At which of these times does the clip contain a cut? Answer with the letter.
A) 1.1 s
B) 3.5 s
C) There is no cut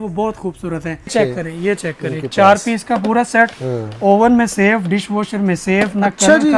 A